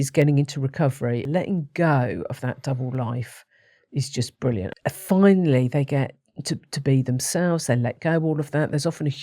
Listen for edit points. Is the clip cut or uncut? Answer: cut